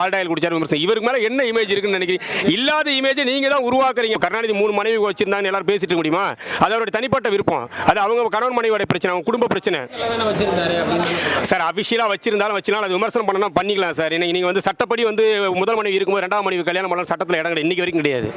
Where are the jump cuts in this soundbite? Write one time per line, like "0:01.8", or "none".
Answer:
0:04.2